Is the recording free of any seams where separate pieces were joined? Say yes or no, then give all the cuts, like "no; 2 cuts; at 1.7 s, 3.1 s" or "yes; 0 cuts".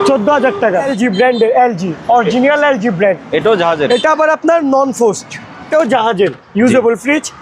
no; 2 cuts; at 0.9 s, 5.6 s